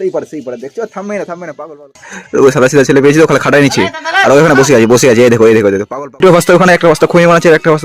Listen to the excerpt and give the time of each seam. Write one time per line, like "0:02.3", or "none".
0:02.1
0:06.1